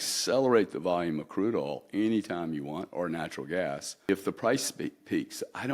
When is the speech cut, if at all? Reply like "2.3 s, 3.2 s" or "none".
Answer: 4.1 s